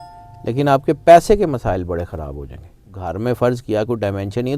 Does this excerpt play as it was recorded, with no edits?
no; 1 cut; at 3.0 s

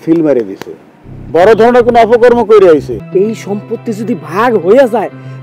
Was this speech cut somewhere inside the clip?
yes; 1 cut; at 3.0 s

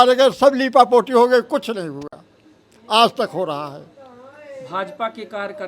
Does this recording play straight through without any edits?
yes; 0 cuts

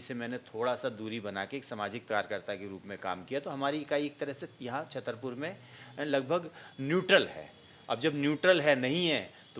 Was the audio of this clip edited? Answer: no; 0 cuts

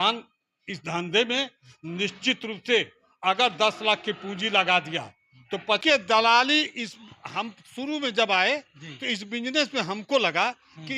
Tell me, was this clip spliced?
yes; 1 cut; at 5.8 s

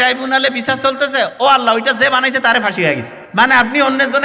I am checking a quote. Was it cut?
yes; 1 cut; at 3.2 s

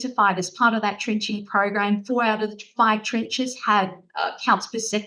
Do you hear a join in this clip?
no; 0 cuts

